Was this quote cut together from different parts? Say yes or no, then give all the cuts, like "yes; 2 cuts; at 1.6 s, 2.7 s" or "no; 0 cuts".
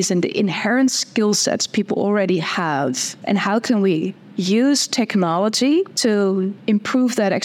yes; 2 cuts; at 3.1 s, 6.5 s